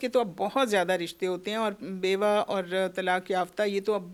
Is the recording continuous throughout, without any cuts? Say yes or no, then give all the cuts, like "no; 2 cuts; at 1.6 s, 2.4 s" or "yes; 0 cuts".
yes; 0 cuts